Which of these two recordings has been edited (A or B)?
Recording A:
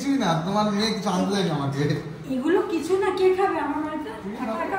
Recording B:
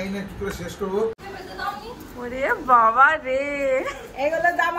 B